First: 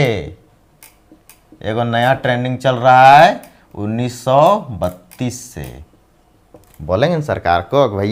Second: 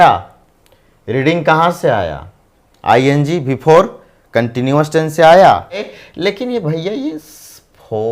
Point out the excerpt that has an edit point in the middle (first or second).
second